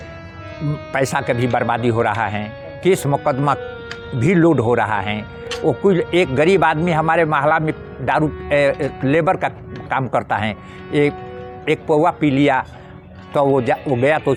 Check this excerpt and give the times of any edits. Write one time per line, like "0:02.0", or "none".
none

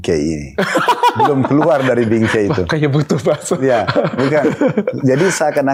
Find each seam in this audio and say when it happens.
none

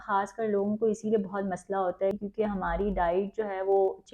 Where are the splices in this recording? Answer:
0:02.2

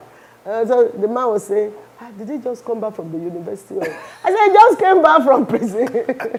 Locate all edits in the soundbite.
none

